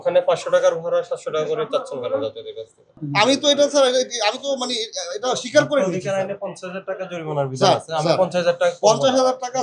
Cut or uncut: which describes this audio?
cut